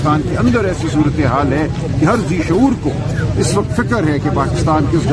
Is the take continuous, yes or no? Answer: yes